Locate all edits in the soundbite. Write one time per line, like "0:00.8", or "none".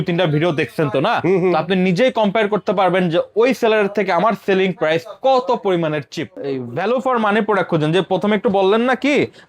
0:06.4